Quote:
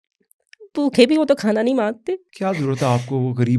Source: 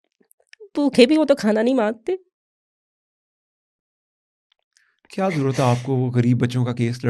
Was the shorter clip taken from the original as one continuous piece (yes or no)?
no